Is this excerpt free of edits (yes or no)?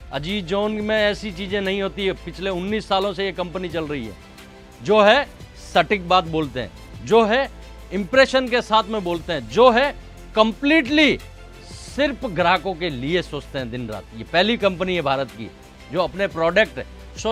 yes